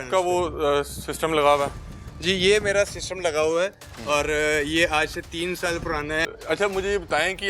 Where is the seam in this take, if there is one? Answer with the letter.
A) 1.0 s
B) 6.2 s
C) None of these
B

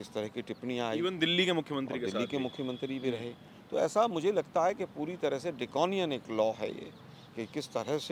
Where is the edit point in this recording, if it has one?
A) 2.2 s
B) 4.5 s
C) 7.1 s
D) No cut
D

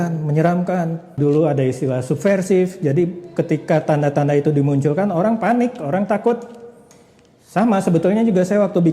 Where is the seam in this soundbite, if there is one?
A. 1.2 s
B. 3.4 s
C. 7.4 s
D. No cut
A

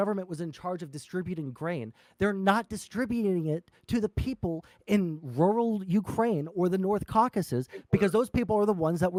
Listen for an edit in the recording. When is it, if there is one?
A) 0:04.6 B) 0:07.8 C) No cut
C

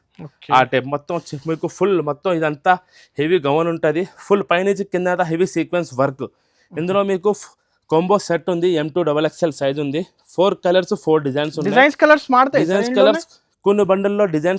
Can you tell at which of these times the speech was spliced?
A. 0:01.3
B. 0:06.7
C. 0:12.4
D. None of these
D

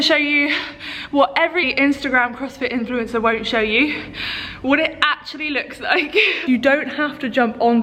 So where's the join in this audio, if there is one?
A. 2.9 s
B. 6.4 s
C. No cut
B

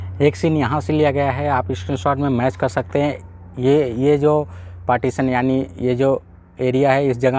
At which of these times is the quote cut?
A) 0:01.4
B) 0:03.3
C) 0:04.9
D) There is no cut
D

